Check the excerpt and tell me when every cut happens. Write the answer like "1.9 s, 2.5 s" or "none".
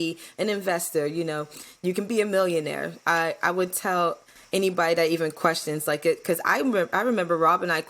none